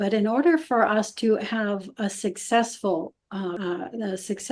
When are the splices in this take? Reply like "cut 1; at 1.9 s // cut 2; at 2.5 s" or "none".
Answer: cut 1; at 3.6 s

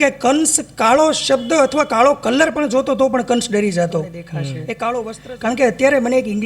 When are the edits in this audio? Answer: cut 1; at 5.2 s

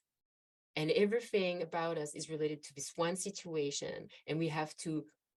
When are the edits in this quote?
none

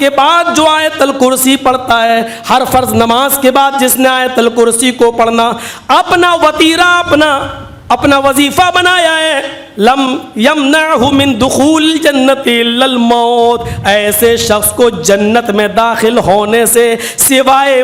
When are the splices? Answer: none

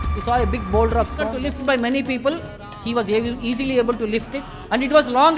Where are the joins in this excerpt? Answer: cut 1; at 1.5 s

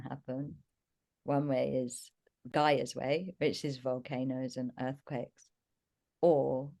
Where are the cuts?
cut 1; at 2.4 s

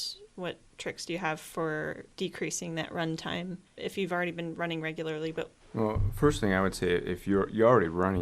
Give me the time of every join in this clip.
cut 1; at 5.6 s

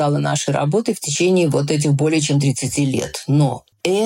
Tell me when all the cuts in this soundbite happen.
cut 1; at 1.1 s

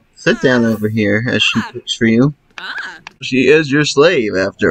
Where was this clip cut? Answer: cut 1; at 3.2 s

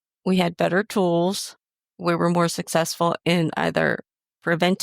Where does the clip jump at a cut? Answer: cut 1; at 1.9 s

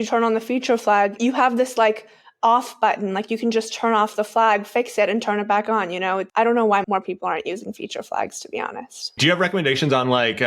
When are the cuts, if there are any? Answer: cut 1; at 1.2 s // cut 2; at 6.3 s // cut 3; at 6.8 s // cut 4; at 9.2 s

